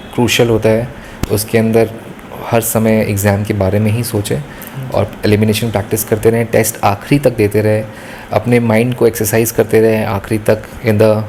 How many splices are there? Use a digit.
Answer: 0